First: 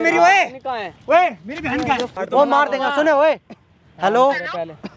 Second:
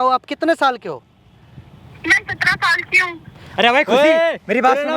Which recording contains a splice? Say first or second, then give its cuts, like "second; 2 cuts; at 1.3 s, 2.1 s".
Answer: first; 1 cut; at 2.2 s